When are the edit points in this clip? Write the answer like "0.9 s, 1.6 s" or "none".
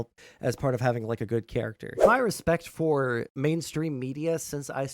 2.0 s, 3.3 s